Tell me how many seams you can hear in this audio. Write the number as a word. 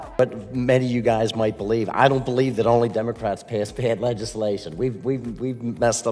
zero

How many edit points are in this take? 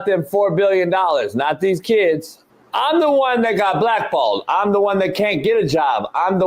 zero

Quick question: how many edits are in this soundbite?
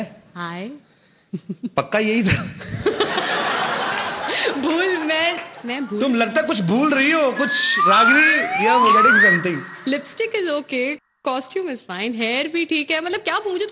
one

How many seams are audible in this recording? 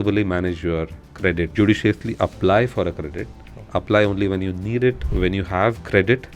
two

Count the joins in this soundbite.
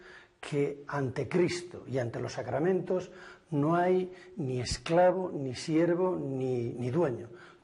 one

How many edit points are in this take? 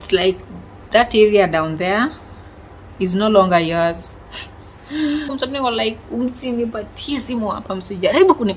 one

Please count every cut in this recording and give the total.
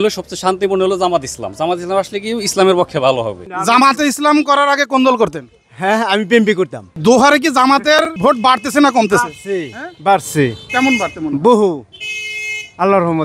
three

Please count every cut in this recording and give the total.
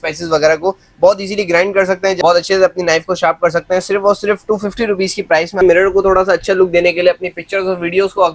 two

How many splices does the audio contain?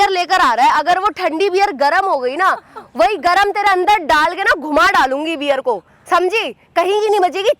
zero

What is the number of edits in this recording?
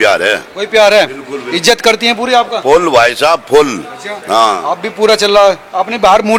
zero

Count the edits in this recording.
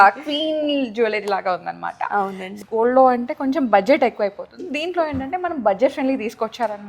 one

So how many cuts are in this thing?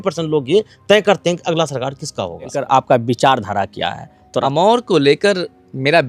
two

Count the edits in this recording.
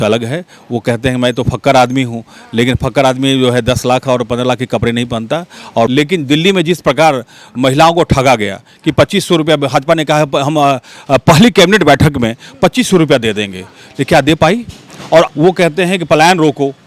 two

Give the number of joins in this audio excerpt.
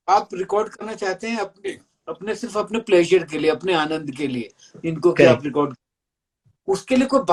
zero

